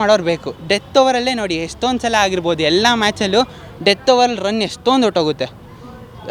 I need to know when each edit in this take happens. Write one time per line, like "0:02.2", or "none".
none